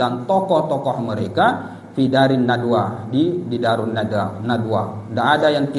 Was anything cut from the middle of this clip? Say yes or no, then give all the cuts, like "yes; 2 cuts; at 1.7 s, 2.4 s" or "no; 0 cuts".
no; 0 cuts